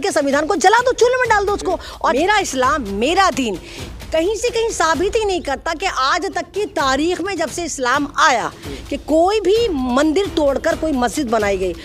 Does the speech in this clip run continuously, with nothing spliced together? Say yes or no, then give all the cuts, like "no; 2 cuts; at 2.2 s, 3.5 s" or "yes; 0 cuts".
no; 1 cut; at 2.1 s